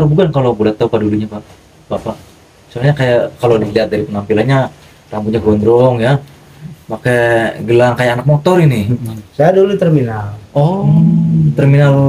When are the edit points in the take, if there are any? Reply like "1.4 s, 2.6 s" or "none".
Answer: none